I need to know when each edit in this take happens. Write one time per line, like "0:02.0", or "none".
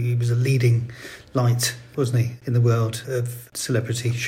0:02.1
0:03.3